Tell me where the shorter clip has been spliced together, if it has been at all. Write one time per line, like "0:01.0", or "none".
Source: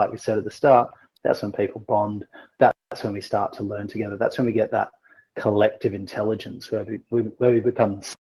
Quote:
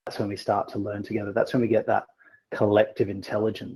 none